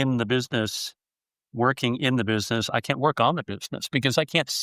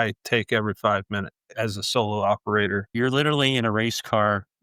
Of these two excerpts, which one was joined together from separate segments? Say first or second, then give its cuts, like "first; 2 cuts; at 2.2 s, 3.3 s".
second; 2 cuts; at 1.4 s, 2.9 s